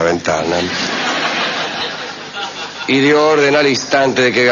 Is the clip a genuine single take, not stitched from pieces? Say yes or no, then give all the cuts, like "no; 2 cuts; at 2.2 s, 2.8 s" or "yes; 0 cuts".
no; 1 cut; at 3.2 s